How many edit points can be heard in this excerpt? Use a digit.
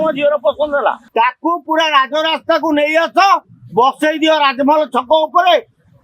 1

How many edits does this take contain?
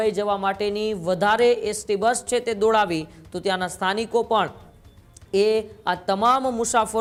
0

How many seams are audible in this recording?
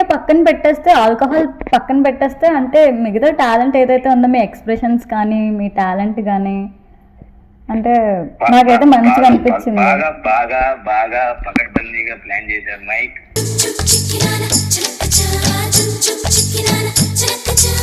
0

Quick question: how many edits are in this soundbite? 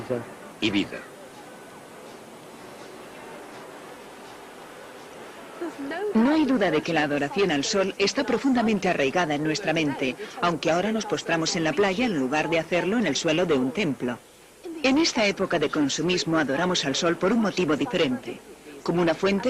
0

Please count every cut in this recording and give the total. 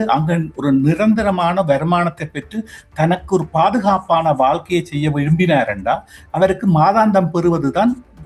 0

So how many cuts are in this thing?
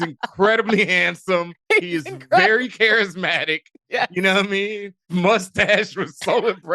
1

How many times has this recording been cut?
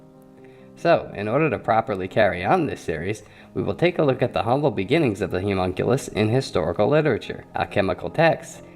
1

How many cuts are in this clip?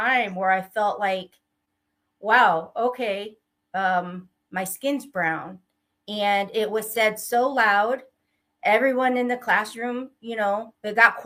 0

